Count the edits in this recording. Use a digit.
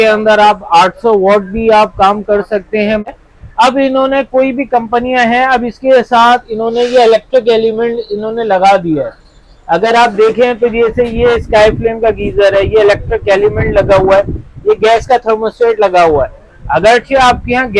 1